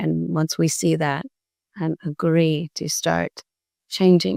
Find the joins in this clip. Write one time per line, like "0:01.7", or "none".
none